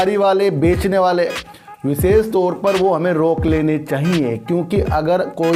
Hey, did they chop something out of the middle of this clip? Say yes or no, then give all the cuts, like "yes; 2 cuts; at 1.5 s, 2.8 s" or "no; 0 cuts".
no; 0 cuts